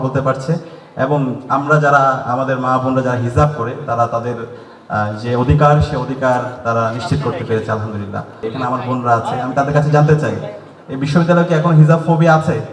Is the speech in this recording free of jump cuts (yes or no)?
no